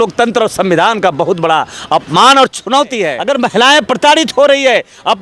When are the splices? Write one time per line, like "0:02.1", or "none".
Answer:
0:03.2